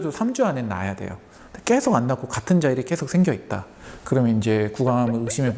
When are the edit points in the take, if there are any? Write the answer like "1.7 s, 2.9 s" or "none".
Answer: none